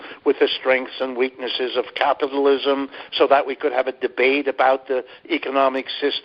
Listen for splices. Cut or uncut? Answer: uncut